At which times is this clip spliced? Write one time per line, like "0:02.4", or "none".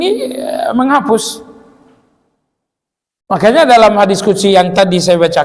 none